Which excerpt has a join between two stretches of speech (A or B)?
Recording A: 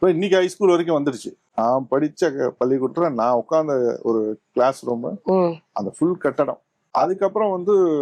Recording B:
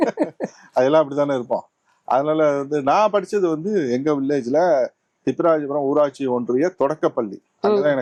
A